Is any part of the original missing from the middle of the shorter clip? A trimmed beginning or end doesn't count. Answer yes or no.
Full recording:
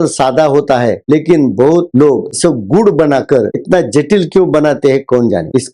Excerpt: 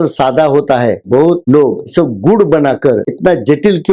yes